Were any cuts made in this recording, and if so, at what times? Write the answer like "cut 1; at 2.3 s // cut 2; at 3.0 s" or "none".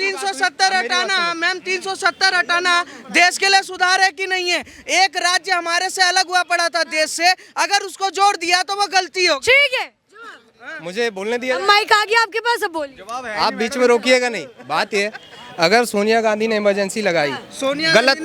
none